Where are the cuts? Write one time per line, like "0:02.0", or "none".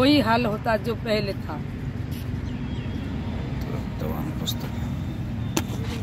none